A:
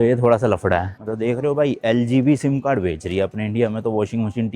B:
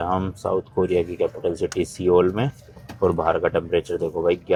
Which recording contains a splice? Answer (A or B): A